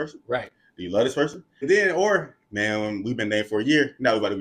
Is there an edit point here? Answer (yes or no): yes